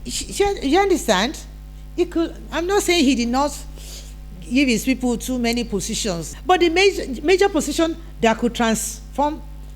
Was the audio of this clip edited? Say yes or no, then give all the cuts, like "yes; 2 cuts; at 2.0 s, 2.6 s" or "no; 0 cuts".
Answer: yes; 1 cut; at 6.3 s